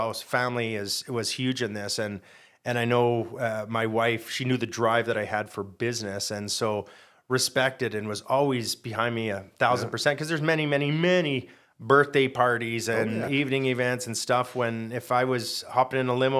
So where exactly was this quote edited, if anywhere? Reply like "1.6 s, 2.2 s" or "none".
none